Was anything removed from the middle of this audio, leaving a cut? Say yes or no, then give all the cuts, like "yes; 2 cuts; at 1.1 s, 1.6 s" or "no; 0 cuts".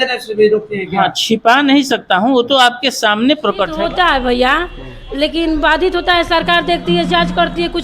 yes; 1 cut; at 3.7 s